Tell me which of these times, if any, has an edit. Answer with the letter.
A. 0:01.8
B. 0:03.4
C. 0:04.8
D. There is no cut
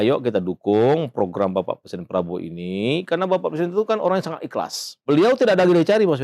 C